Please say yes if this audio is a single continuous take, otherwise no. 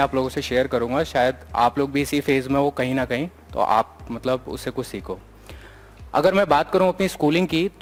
yes